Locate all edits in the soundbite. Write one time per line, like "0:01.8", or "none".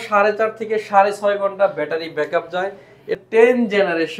0:03.2